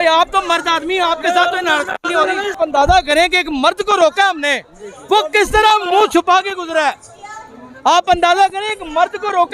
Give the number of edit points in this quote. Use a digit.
1